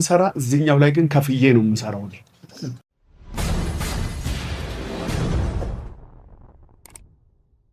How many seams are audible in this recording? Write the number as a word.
one